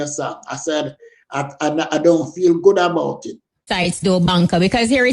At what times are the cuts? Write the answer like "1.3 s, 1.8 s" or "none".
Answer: 3.7 s